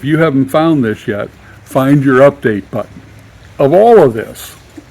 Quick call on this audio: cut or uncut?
cut